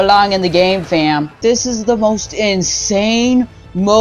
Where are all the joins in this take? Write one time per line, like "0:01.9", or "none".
0:01.4